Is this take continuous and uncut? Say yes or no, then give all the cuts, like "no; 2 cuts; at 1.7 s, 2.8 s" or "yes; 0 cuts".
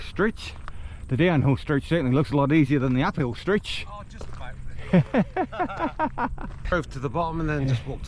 no; 1 cut; at 6.7 s